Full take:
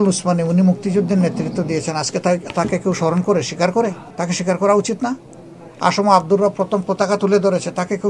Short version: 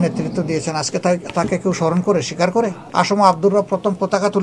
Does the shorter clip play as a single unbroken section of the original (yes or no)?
no